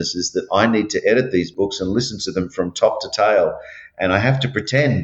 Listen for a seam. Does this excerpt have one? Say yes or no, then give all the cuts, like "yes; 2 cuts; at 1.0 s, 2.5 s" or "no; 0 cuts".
yes; 1 cut; at 1.5 s